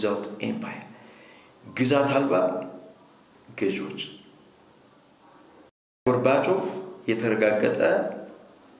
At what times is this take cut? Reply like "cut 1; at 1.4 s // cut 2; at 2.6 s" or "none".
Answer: cut 1; at 6.1 s